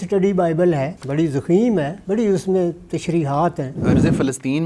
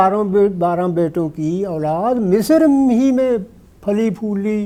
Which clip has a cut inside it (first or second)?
first